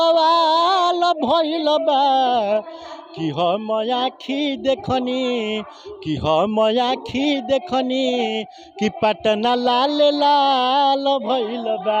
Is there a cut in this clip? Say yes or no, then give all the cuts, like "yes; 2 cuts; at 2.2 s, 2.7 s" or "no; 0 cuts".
no; 0 cuts